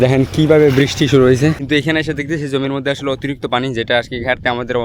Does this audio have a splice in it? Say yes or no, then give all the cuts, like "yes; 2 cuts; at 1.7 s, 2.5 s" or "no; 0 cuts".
yes; 1 cut; at 1.6 s